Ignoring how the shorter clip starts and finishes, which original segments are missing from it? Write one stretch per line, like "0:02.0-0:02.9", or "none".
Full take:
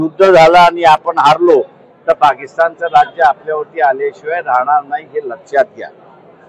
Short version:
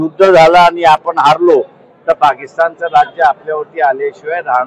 none